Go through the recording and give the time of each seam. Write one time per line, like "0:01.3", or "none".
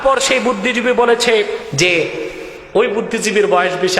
0:01.7